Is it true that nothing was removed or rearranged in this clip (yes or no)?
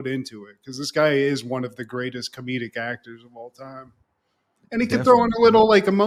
yes